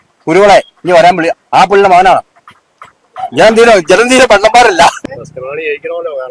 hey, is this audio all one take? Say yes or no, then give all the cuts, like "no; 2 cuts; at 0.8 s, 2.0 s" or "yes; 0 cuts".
no; 1 cut; at 5.1 s